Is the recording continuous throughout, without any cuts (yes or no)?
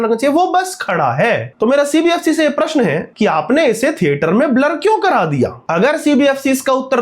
no